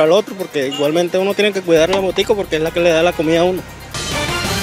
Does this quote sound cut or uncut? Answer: cut